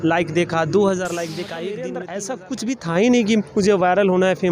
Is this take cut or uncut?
cut